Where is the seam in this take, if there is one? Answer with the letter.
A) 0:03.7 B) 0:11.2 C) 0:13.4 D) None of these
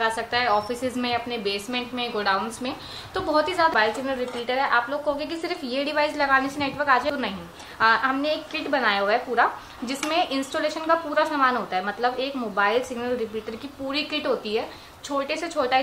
A